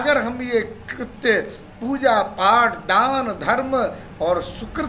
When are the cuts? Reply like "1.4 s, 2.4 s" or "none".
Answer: none